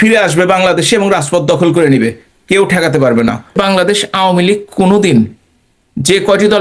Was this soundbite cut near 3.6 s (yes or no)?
yes